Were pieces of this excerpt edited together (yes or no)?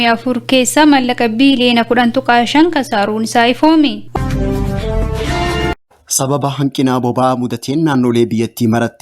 yes